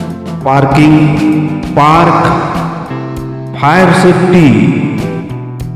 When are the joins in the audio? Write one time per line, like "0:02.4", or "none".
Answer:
none